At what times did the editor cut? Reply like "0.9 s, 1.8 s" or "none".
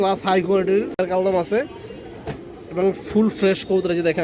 1.0 s